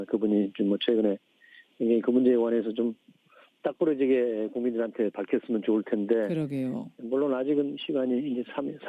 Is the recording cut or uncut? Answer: uncut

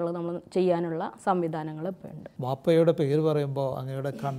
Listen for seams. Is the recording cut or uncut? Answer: cut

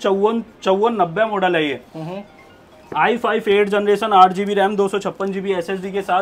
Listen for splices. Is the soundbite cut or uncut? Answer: uncut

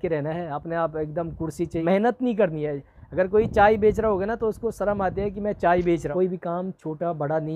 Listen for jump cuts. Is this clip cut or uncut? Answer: cut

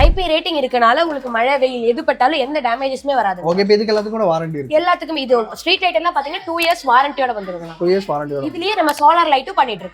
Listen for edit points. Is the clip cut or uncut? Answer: uncut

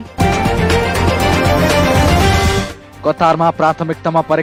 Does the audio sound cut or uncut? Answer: uncut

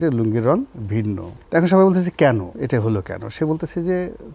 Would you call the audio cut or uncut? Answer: cut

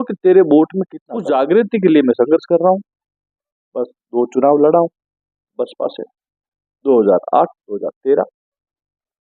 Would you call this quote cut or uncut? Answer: uncut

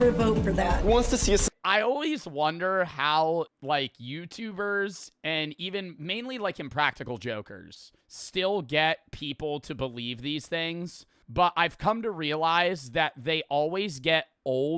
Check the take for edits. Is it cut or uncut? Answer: cut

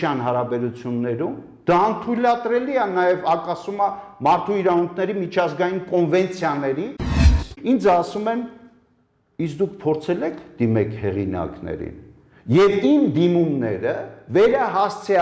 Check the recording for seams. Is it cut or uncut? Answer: cut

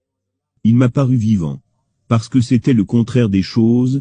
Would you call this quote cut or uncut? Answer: uncut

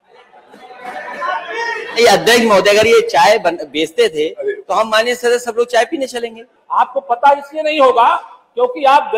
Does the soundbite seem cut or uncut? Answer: cut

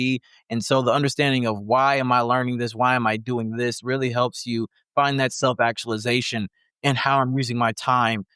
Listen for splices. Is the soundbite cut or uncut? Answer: uncut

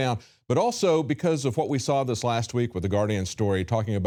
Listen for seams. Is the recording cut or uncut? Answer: uncut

